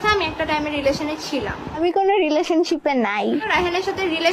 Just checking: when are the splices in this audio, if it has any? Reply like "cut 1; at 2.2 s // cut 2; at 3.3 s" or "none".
none